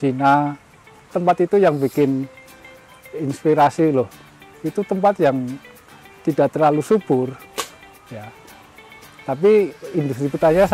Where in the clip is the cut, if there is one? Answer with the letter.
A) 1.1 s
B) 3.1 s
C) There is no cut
A